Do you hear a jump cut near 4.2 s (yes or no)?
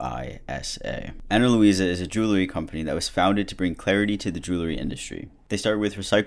no